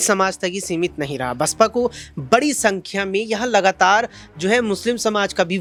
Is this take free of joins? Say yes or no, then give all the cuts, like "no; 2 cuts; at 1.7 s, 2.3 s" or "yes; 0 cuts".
yes; 0 cuts